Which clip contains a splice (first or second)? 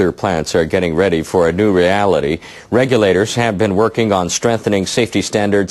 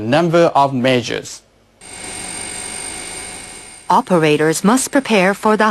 second